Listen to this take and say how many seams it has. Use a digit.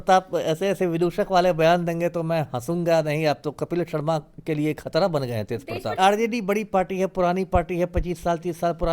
1